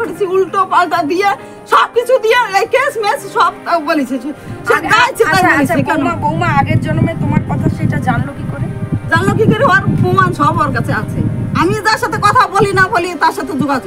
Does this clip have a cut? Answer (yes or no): no